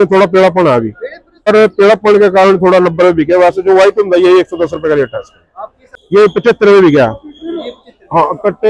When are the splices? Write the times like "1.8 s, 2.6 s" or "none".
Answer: 1.5 s, 5.5 s